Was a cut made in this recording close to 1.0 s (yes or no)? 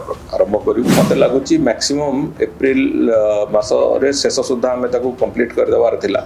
yes